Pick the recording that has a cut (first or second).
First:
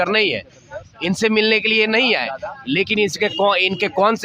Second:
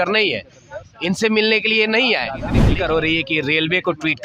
second